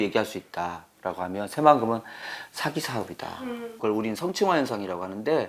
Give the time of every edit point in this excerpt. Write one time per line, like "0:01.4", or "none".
0:03.8